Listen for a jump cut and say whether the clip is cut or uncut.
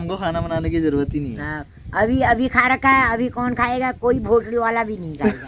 uncut